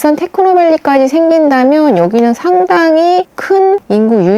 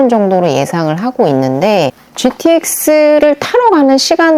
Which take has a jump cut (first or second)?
second